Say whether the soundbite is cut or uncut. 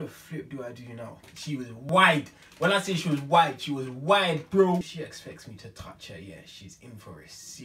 cut